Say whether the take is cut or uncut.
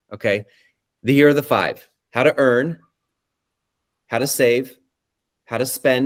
uncut